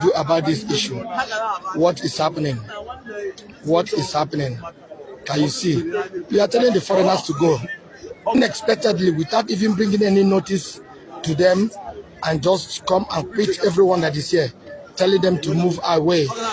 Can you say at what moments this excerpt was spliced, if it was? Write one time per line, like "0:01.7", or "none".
0:08.4